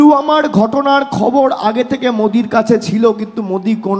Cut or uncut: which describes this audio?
uncut